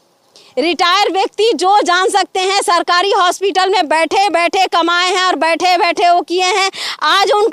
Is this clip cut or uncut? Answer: uncut